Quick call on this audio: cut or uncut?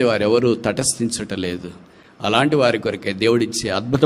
uncut